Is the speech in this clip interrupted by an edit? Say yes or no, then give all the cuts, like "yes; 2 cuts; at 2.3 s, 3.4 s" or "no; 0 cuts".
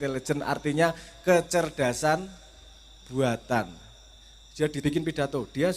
yes; 1 cut; at 4.8 s